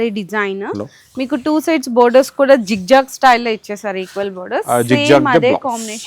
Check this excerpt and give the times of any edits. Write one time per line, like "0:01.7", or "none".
none